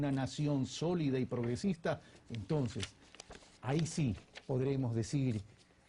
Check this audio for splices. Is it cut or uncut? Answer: uncut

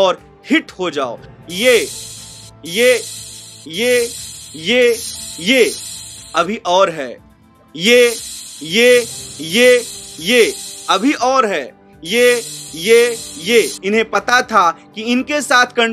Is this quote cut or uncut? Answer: cut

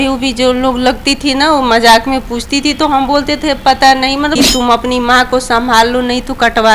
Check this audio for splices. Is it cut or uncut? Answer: cut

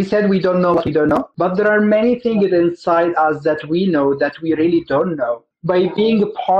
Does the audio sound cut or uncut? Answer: cut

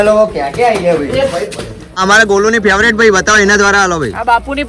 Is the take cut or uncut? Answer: cut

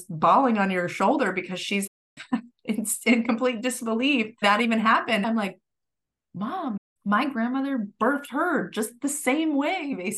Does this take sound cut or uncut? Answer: uncut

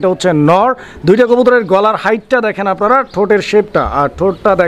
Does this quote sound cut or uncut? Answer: uncut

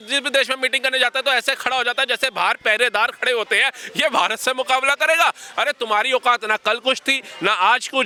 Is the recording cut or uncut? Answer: uncut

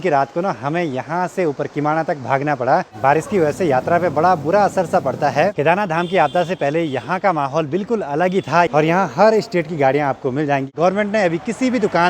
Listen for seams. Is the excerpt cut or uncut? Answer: cut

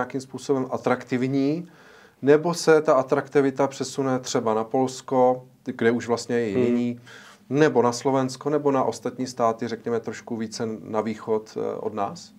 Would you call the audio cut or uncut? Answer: uncut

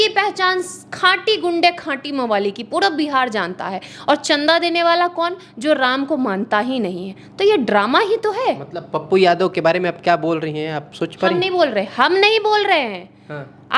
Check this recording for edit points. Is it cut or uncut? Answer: uncut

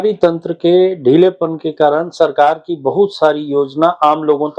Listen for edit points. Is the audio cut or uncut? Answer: uncut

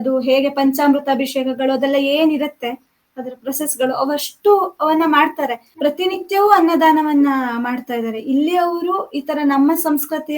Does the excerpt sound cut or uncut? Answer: cut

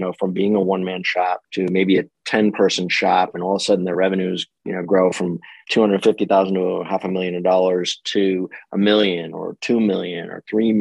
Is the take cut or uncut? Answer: cut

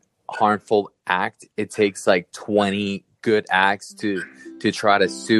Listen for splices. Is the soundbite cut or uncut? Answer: uncut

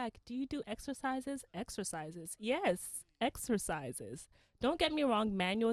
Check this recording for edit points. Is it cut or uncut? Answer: uncut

